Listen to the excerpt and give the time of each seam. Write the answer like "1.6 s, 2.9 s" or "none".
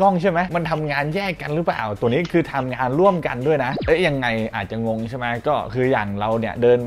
none